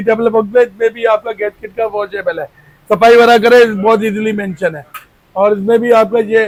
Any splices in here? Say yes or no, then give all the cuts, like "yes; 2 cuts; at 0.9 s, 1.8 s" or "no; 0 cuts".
no; 0 cuts